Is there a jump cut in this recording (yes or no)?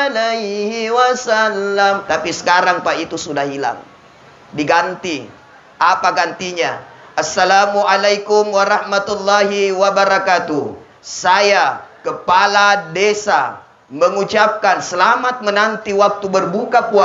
yes